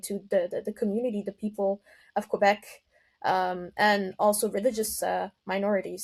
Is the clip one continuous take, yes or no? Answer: yes